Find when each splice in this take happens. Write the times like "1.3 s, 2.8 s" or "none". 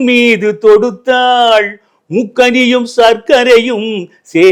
none